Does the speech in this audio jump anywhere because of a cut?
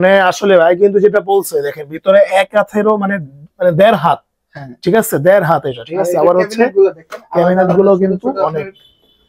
no; 0 cuts

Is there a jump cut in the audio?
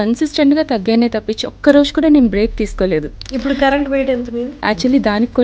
yes; 2 cuts; at 3.2 s, 4.5 s

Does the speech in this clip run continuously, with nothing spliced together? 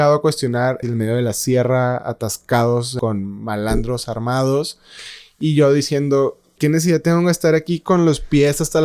no; 3 cuts; at 0.8 s, 2.9 s, 6.6 s

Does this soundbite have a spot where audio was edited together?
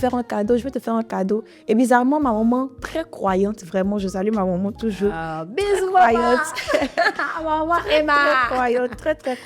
no; 0 cuts

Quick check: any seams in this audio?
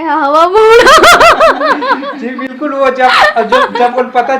no; 0 cuts

